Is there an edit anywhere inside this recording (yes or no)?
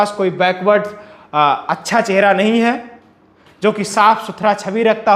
no